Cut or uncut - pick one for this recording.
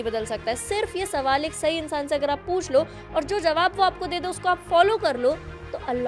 uncut